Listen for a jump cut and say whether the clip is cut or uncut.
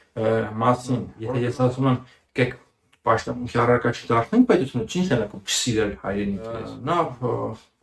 cut